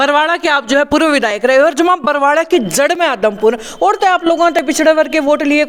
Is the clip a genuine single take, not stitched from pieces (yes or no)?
yes